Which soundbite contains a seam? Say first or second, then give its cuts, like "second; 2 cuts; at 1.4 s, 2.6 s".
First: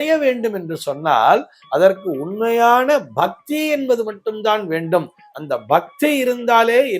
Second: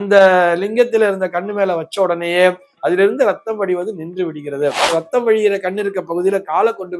second; 1 cut; at 4.9 s